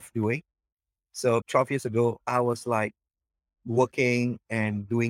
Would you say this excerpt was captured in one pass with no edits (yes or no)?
no